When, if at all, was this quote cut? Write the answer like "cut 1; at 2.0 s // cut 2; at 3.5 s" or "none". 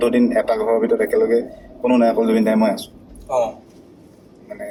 none

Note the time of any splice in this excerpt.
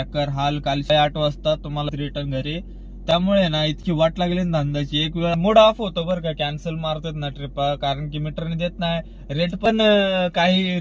cut 1; at 0.9 s // cut 2; at 1.9 s // cut 3; at 5.3 s

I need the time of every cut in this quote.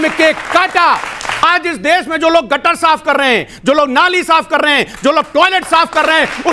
cut 1; at 1.5 s

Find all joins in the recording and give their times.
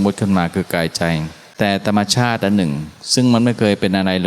cut 1; at 1.4 s

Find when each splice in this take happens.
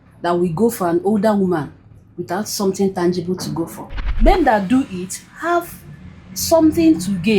cut 1; at 4.1 s

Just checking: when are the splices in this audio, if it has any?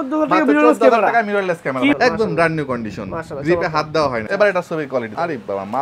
cut 1; at 2.0 s // cut 2; at 4.2 s

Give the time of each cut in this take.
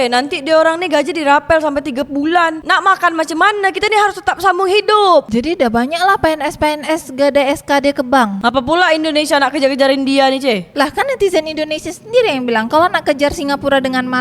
cut 1; at 8.4 s

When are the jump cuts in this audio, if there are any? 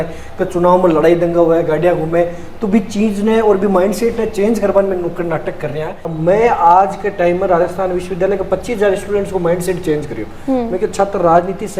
cut 1; at 6.1 s

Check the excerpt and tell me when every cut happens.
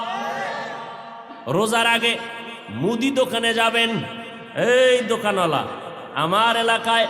cut 1; at 1.3 s

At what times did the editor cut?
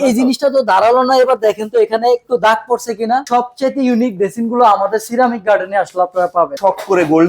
cut 1; at 3.2 s // cut 2; at 6.5 s

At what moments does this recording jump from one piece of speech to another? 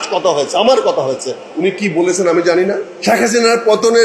cut 1; at 2.9 s

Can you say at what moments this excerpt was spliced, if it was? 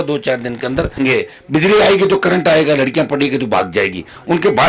cut 1; at 1.0 s

